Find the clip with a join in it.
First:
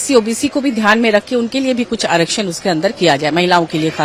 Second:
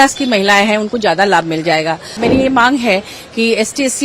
second; 1 cut; at 2.2 s

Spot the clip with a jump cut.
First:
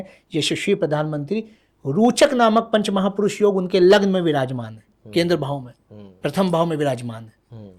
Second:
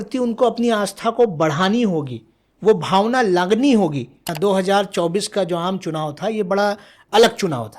second; 1 cut; at 4.3 s

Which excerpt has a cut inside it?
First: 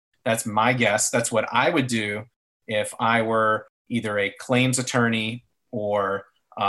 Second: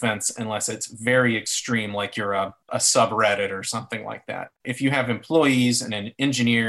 second; 2 cuts; at 2.7 s, 4.6 s

